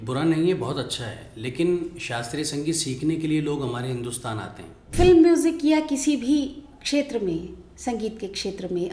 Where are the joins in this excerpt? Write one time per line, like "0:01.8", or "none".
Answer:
0:04.9